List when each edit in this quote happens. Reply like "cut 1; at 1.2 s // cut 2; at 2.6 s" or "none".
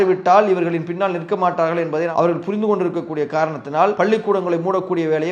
cut 1; at 4.0 s